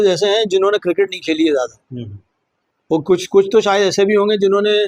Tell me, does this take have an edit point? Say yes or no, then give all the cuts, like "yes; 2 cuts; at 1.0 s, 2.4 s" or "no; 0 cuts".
no; 0 cuts